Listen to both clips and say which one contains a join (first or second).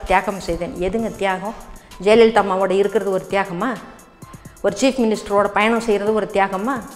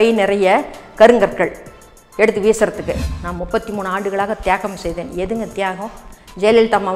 second